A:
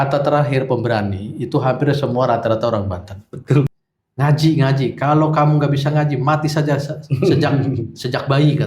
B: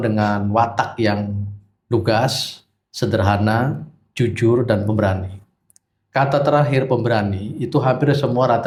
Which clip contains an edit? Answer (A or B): A